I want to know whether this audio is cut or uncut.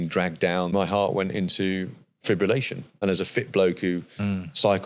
cut